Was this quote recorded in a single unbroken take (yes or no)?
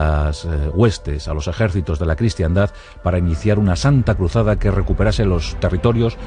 yes